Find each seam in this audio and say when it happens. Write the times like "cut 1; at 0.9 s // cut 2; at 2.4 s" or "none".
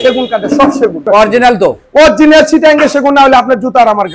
cut 1; at 1.1 s